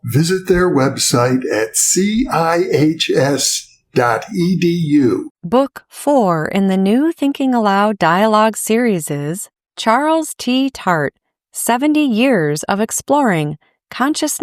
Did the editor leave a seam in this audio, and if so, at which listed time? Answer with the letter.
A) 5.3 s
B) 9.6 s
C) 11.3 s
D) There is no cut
A